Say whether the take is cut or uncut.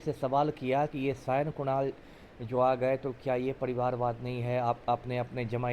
uncut